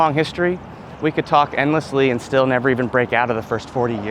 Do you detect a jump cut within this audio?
no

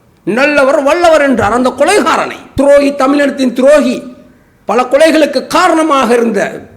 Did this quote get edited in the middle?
yes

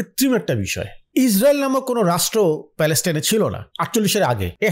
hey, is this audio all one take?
no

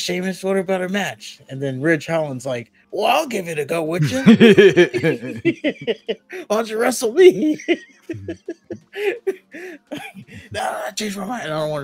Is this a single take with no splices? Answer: no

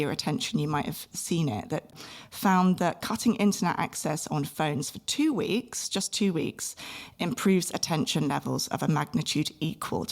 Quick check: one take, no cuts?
no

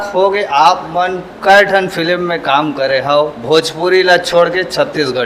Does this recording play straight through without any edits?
yes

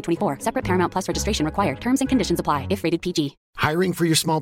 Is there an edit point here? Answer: no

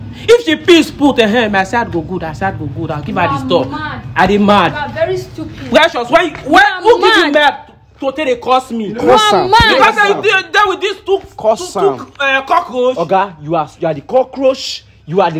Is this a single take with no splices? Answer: yes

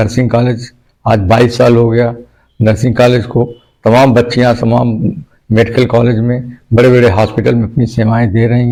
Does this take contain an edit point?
no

